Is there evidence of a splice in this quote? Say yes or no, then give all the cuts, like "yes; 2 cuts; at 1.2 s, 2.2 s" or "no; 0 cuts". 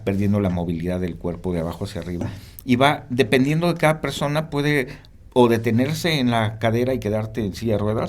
yes; 1 cut; at 2.3 s